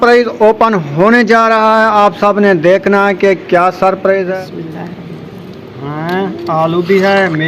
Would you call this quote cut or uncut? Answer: cut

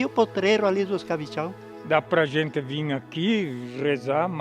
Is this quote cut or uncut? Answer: cut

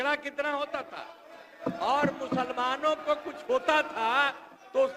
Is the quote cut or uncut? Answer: uncut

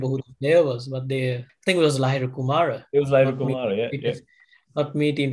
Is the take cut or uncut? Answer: cut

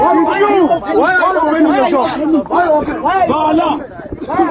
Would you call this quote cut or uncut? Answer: uncut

